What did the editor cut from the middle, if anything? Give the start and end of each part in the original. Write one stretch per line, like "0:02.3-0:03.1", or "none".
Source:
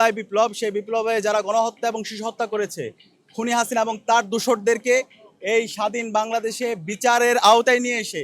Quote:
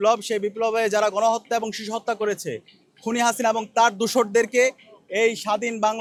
none